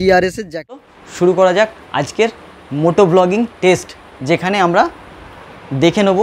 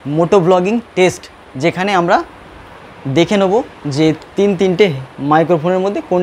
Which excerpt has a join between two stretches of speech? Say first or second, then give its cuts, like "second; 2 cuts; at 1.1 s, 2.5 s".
first; 1 cut; at 1.0 s